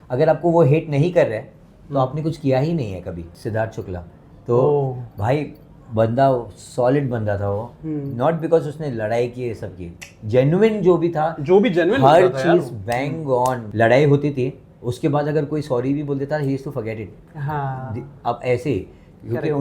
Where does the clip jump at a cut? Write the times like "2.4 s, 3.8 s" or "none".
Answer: 3.4 s, 13.6 s